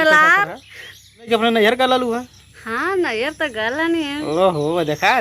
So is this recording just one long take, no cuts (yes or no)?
no